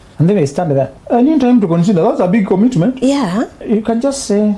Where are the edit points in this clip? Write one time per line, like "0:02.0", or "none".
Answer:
0:01.0
0:03.6